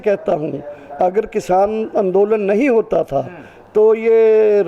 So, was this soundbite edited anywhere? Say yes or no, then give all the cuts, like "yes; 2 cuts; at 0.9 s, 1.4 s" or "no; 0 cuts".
no; 0 cuts